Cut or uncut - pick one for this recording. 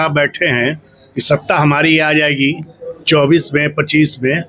uncut